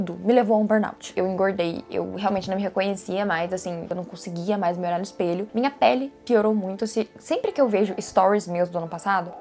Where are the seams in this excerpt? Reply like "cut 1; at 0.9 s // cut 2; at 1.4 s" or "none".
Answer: cut 1; at 1.1 s // cut 2; at 3.9 s // cut 3; at 5.5 s